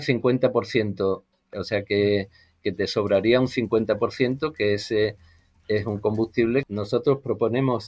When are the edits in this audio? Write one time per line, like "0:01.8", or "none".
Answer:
0:01.3
0:06.7